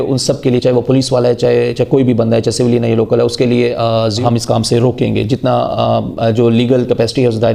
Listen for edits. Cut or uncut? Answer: cut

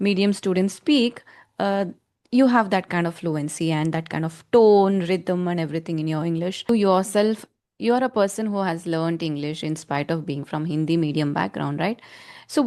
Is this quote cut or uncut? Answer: cut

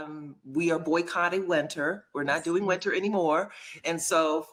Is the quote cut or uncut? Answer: uncut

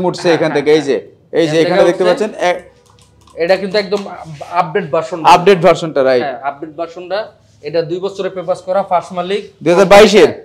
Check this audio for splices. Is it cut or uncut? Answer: uncut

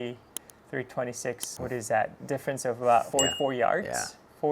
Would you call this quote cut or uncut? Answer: cut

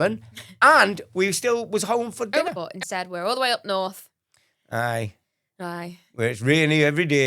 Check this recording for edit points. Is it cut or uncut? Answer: cut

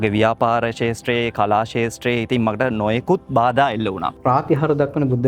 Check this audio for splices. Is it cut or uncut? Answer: cut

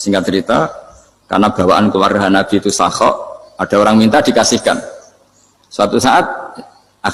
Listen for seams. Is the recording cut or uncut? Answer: uncut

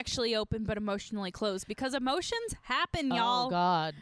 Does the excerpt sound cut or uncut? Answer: uncut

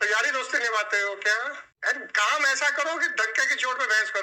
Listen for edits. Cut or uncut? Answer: cut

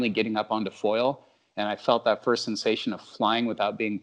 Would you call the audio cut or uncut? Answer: uncut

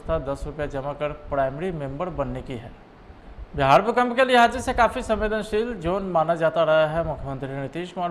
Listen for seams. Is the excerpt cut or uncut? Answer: cut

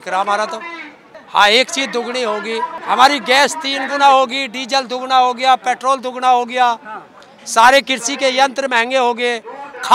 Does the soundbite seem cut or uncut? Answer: cut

